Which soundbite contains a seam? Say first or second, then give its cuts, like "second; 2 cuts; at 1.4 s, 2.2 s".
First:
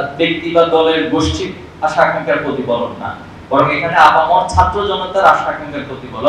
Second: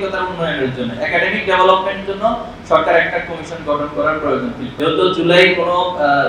second; 1 cut; at 4.7 s